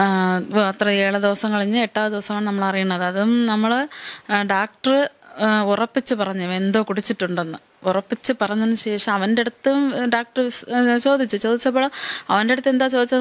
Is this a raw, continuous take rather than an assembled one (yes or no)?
yes